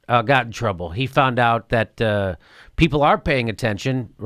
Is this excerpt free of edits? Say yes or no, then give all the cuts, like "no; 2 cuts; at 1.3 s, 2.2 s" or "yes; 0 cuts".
yes; 0 cuts